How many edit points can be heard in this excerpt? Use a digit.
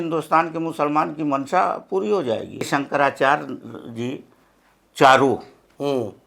1